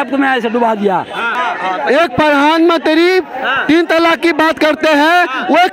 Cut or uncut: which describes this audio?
cut